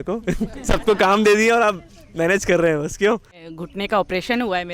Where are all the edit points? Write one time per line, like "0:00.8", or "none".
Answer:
0:03.5